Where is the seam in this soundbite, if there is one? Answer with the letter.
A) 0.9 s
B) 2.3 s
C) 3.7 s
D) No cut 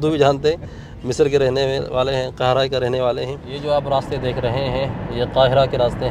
C